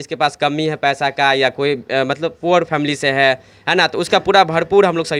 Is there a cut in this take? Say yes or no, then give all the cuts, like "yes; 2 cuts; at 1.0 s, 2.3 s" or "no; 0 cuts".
no; 0 cuts